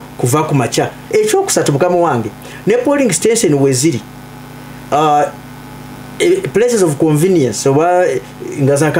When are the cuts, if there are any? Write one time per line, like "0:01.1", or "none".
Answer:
0:01.0